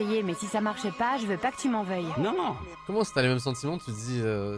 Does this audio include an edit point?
yes; 1 cut; at 2.7 s

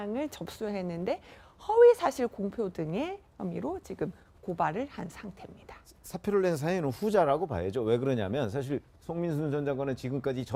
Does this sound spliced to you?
no; 0 cuts

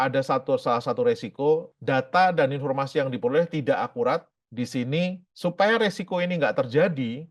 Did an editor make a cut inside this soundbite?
no; 0 cuts

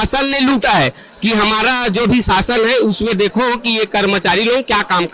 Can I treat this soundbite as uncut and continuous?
yes; 0 cuts

